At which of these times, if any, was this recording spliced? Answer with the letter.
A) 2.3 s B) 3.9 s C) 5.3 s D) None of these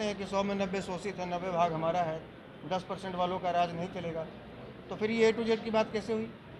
D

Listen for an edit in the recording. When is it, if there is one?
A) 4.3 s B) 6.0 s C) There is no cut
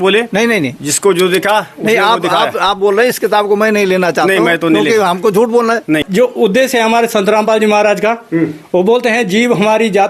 B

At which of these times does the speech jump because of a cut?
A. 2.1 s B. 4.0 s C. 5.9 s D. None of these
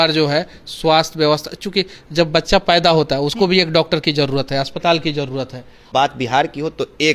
C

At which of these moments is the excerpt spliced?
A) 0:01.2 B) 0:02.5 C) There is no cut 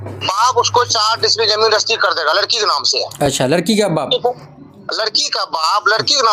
C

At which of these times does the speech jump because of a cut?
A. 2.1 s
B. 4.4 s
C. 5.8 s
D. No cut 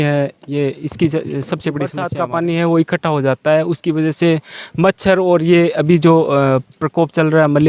A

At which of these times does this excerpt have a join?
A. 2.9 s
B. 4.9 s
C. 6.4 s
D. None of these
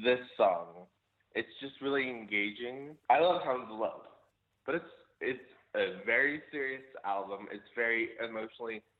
A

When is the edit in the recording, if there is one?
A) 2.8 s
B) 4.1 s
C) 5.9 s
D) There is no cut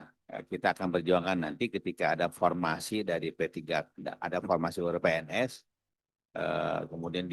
D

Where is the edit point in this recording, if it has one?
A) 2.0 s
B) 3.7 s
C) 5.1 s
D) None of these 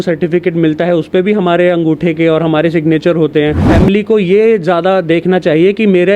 B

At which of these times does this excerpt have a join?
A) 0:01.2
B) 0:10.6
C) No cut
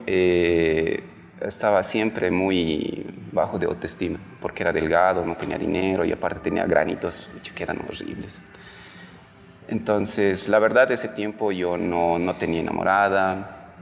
C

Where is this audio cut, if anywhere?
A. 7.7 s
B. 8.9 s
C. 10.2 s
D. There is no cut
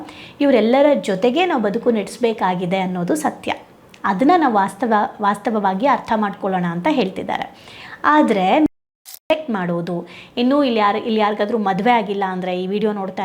B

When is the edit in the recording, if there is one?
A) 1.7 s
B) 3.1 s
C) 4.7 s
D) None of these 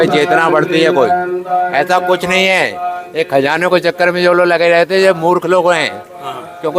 D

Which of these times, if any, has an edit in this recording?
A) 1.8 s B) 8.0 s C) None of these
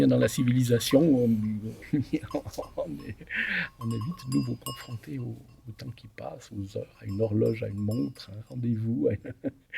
A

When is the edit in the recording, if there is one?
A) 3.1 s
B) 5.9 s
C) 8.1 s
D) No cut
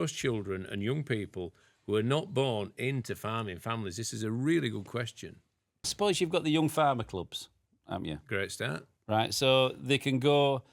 B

